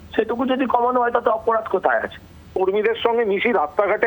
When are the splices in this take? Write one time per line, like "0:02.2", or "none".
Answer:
0:02.5